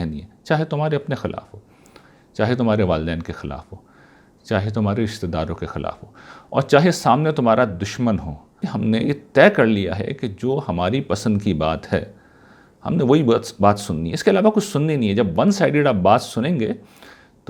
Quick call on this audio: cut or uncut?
cut